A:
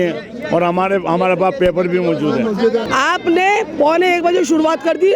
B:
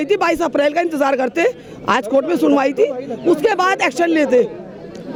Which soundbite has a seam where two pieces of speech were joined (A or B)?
A